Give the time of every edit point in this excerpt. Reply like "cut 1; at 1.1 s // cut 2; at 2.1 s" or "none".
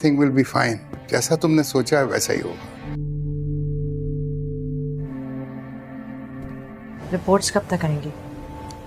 cut 1; at 2.8 s // cut 2; at 5.1 s // cut 3; at 7.0 s